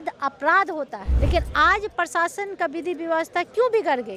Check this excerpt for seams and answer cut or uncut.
cut